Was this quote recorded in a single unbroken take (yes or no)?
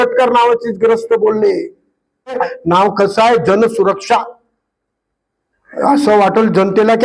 no